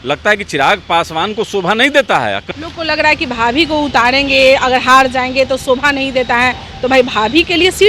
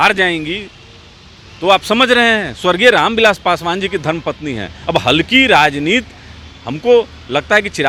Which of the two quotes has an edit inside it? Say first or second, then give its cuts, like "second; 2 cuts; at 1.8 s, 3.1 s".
first; 1 cut; at 2.5 s